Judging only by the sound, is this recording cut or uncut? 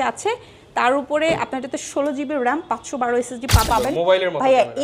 cut